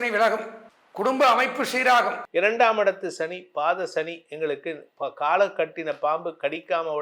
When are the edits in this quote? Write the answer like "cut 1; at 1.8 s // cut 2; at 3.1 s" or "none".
cut 1; at 2.2 s

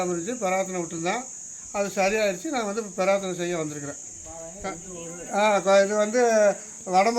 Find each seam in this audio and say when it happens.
cut 1; at 4.5 s

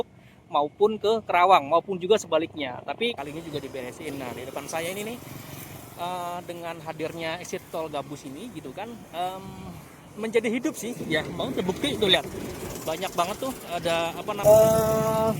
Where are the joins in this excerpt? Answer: cut 1; at 3.2 s // cut 2; at 14.3 s

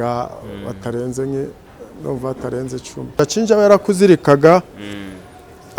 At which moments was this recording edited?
cut 1; at 3.1 s

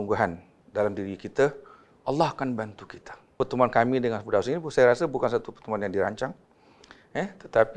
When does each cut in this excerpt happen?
cut 1; at 3.3 s

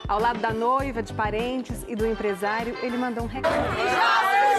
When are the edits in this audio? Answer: none

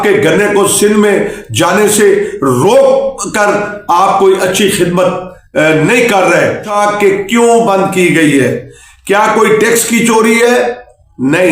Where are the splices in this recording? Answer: cut 1; at 6.7 s

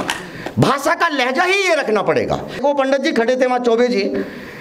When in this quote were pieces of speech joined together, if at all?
cut 1; at 2.6 s

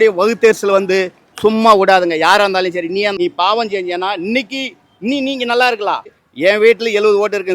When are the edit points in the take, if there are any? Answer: cut 1; at 3.1 s // cut 2; at 6.2 s

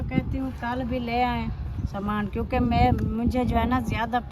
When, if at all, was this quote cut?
none

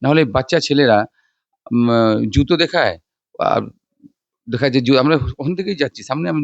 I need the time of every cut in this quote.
none

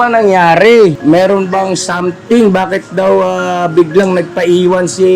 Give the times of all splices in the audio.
cut 1; at 1.0 s

